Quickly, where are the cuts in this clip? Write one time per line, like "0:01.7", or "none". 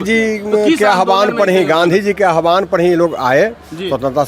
none